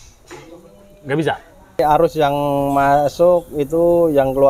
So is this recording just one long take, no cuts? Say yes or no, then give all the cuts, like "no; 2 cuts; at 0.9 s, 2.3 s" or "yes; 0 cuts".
no; 1 cut; at 1.8 s